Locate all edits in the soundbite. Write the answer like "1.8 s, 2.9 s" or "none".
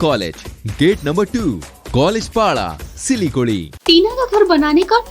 3.7 s

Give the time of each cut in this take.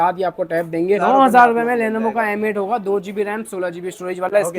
1.0 s

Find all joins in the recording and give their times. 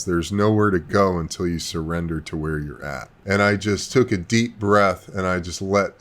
3.1 s

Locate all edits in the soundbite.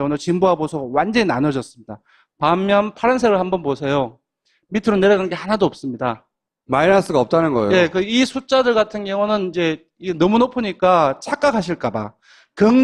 none

